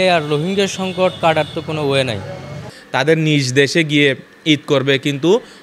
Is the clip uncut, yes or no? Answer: yes